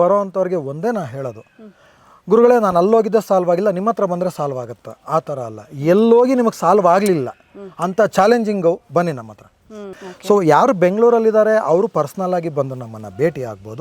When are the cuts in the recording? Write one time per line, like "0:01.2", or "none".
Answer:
0:10.0